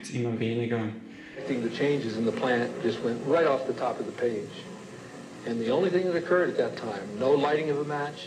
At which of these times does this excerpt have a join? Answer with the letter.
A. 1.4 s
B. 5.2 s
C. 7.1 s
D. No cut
A